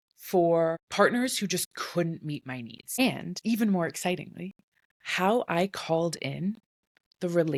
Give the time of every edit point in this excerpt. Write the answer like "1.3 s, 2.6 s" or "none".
none

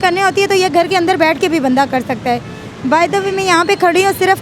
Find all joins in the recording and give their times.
none

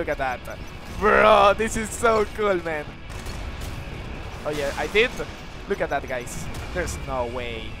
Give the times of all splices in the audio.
3.0 s

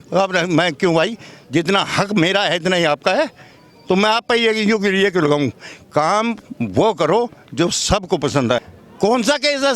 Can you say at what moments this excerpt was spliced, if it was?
8.6 s

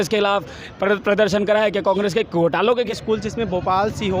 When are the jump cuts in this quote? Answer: 2.7 s

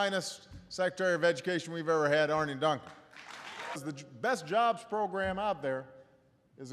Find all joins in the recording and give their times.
none

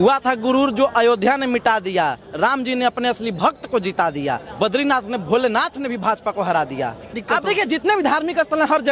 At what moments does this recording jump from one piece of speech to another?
4.5 s, 7.2 s

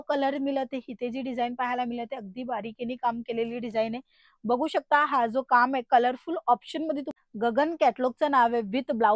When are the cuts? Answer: 7.1 s

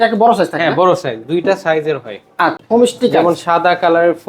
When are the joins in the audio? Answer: 2.5 s

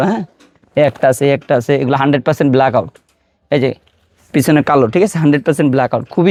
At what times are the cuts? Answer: none

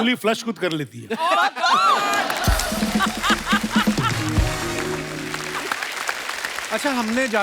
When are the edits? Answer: 5.4 s, 6.6 s

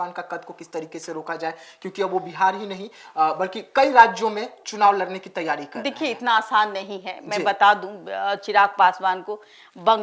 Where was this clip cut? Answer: none

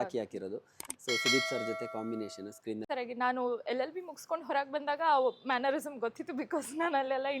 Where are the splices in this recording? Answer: 2.8 s

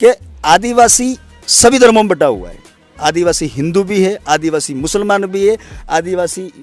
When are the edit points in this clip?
none

